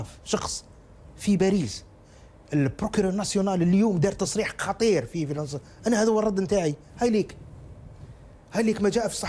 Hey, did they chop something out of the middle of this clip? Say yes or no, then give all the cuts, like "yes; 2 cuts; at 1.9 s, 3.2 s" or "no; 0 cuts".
no; 0 cuts